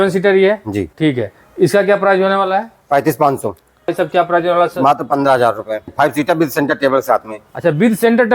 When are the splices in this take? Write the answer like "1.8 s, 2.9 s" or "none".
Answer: 0.9 s, 3.9 s, 5.9 s